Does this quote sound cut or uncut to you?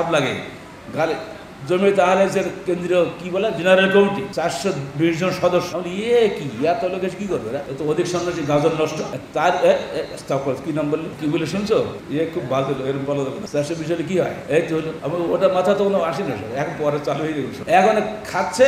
cut